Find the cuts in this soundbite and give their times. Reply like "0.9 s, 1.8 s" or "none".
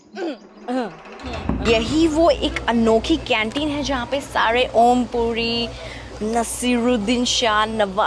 1.6 s